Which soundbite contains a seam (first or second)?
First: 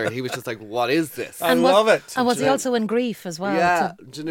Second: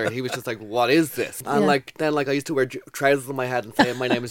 second